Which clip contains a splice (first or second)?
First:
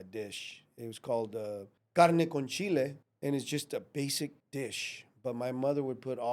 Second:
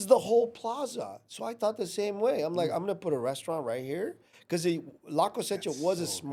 first